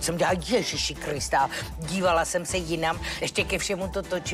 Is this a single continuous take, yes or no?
no